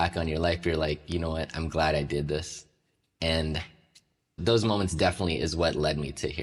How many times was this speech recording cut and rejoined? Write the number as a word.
zero